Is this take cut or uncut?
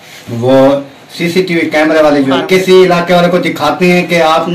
cut